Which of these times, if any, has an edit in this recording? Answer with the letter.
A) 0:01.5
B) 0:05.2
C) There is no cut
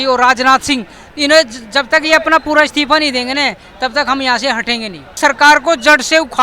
B